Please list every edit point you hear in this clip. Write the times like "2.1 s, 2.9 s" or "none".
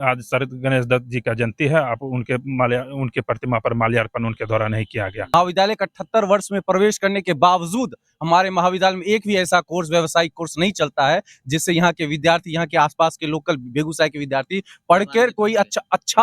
5.3 s